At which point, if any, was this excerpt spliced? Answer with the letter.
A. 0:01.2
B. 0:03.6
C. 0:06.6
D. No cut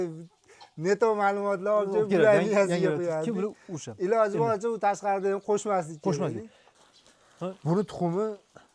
C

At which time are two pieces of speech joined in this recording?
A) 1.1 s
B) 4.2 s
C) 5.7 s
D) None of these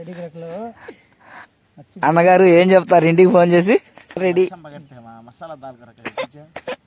B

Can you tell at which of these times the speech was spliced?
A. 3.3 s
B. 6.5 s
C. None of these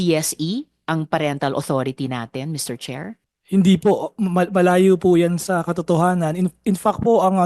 A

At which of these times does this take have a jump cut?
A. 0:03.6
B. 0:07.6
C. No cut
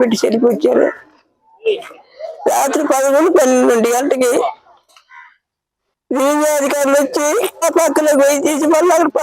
B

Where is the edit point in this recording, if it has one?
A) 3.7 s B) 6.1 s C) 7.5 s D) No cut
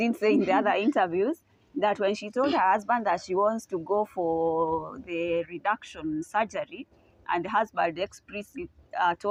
D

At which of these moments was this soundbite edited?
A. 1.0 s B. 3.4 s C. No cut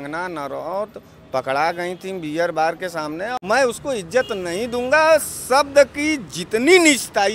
B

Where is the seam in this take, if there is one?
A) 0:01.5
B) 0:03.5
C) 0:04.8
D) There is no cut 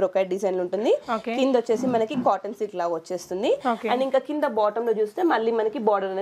D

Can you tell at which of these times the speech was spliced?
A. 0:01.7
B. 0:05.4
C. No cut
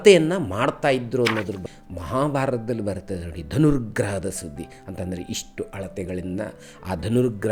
A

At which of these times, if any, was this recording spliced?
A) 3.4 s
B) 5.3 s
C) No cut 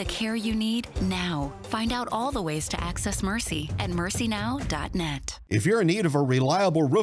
B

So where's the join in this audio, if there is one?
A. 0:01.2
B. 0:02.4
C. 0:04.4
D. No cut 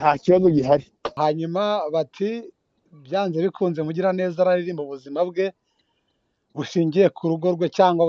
A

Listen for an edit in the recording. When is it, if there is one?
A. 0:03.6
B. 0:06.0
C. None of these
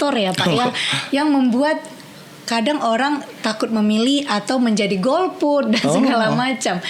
C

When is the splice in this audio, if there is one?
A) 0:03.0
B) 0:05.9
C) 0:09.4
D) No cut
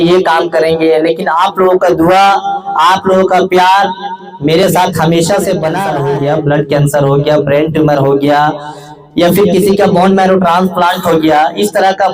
B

